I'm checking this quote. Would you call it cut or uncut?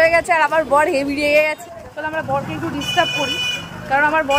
cut